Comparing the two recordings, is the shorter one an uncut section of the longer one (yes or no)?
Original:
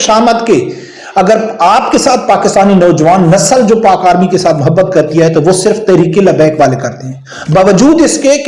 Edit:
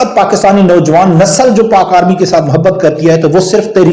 yes